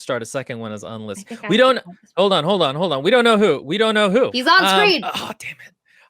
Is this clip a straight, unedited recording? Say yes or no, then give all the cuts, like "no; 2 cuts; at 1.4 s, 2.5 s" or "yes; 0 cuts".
no; 2 cuts; at 4.3 s, 5.0 s